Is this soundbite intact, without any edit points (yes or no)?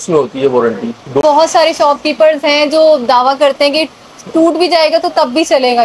no